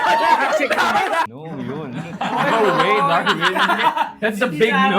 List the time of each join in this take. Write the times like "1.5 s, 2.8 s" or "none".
1.2 s